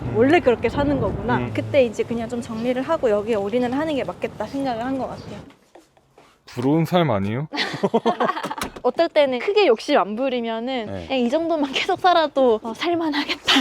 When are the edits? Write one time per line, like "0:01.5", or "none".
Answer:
0:01.5
0:05.4